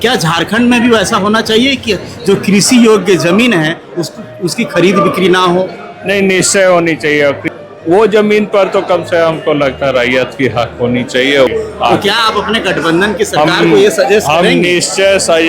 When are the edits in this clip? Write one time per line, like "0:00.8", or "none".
0:07.5
0:11.5